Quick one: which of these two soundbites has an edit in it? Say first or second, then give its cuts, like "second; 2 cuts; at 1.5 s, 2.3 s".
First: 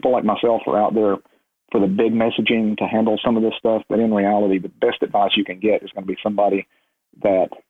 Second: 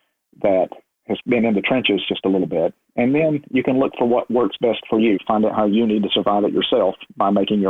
second; 1 cut; at 5.2 s